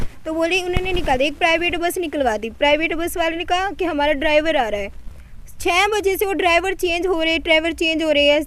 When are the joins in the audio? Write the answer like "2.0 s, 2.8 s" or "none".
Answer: none